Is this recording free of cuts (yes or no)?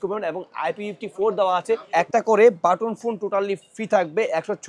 no